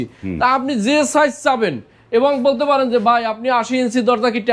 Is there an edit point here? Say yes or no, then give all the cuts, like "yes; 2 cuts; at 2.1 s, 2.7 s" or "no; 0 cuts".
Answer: no; 0 cuts